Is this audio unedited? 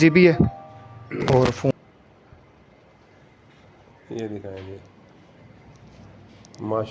no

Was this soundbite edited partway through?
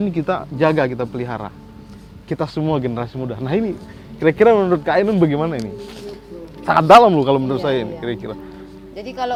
no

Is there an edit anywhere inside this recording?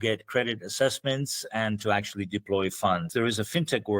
yes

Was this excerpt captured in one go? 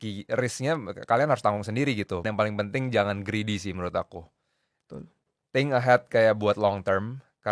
no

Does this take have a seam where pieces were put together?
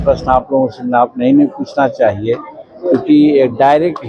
no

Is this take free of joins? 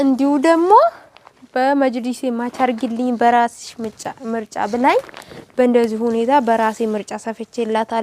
yes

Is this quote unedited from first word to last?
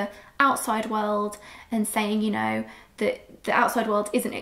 yes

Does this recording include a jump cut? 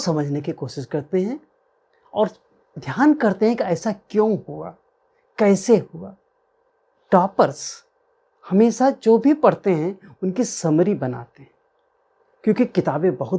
no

